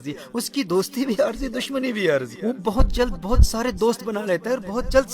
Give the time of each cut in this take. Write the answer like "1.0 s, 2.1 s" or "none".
2.3 s